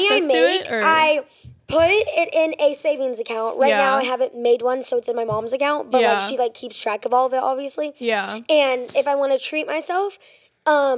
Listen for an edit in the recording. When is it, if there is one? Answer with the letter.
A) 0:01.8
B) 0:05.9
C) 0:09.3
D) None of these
D